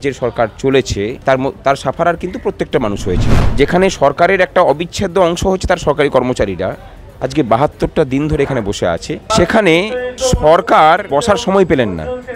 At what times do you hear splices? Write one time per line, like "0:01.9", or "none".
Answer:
0:01.2
0:03.4
0:09.3
0:10.1
0:11.0